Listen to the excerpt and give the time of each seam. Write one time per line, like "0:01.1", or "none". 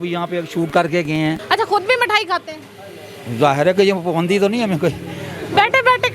0:01.4